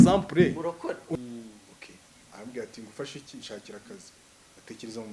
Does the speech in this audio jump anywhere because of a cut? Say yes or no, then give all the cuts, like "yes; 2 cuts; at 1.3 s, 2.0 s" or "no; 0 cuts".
yes; 1 cut; at 1.2 s